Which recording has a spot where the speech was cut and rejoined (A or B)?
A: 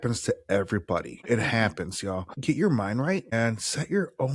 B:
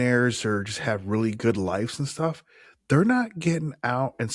A